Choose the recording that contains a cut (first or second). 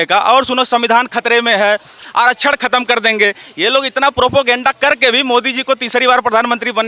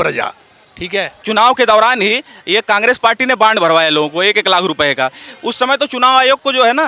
second